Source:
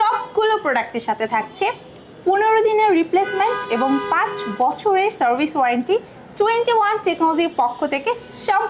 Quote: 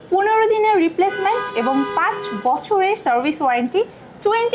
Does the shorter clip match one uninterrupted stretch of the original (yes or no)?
yes